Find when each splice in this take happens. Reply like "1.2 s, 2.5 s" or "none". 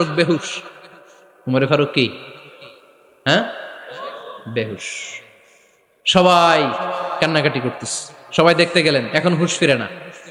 none